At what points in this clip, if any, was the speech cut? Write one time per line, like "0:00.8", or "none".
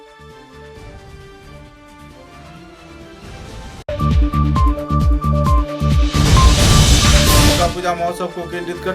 none